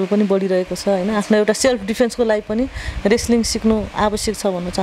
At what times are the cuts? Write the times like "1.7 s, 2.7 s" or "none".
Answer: none